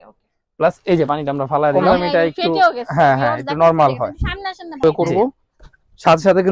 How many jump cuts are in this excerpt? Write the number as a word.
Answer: two